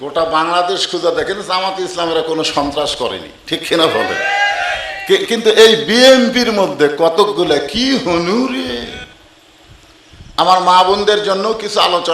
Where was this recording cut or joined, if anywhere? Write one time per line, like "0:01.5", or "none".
0:09.0